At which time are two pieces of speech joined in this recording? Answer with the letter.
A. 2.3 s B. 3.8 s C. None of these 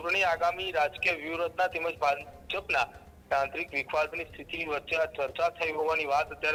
C